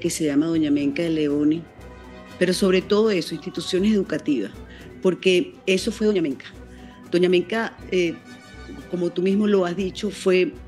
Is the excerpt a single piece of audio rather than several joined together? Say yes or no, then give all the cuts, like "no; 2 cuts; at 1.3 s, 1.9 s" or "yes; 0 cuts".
yes; 0 cuts